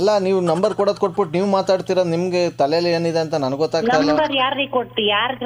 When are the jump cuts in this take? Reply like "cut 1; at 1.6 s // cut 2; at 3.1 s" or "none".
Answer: none